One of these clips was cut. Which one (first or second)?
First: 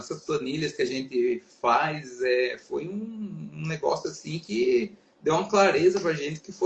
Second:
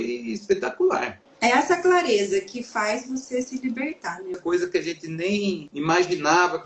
second